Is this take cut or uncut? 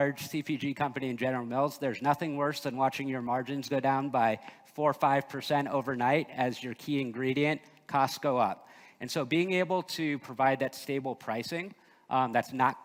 uncut